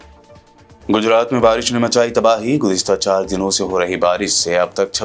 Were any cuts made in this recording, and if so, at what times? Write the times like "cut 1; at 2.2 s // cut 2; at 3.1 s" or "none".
none